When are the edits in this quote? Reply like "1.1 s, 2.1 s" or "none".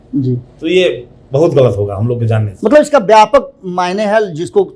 none